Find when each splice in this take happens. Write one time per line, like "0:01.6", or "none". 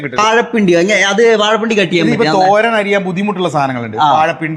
none